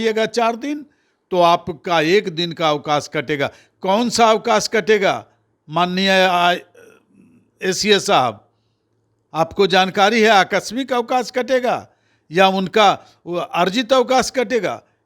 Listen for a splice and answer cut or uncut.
uncut